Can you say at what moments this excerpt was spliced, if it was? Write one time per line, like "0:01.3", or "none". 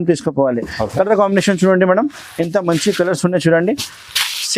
none